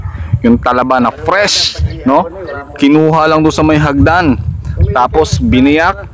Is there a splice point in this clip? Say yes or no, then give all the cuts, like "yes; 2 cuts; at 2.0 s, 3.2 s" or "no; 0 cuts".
no; 0 cuts